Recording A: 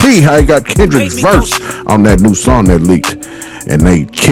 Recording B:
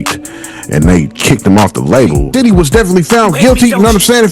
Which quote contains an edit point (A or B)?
B